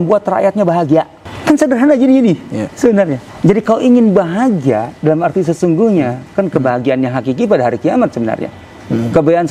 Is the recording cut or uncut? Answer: cut